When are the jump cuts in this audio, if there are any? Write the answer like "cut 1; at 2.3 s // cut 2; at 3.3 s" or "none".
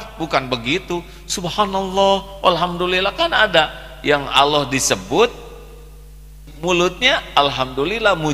cut 1; at 6.4 s